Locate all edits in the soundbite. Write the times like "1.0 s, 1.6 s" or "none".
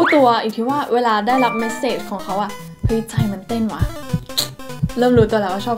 none